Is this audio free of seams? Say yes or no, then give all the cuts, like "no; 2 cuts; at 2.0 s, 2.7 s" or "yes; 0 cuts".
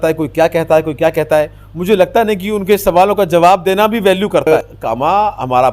no; 1 cut; at 4.5 s